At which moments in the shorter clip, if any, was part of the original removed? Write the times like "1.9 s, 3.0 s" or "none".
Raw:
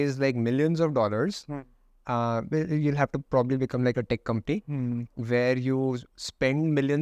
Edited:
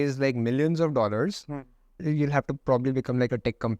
2.0 s